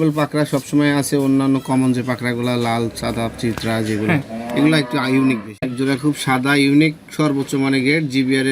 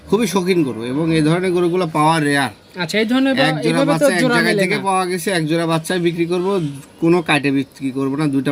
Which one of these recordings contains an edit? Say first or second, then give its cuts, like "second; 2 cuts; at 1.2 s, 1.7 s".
first; 1 cut; at 5.7 s